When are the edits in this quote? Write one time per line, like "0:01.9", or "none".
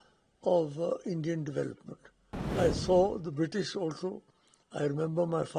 0:02.6